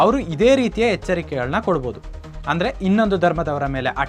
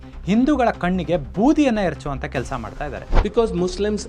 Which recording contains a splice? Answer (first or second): second